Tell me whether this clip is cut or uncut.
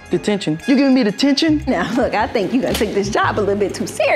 cut